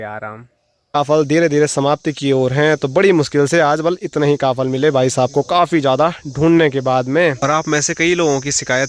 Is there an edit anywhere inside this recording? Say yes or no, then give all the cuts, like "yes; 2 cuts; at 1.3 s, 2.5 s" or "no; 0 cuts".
yes; 2 cuts; at 1.0 s, 7.4 s